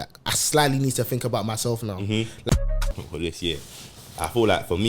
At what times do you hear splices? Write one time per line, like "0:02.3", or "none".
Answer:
0:02.6